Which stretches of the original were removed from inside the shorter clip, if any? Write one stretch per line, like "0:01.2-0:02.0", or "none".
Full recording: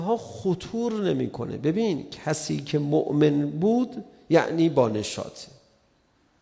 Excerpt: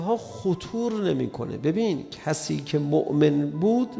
none